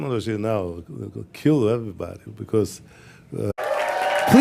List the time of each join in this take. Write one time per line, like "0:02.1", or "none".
none